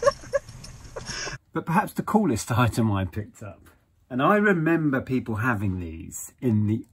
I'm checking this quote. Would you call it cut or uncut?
cut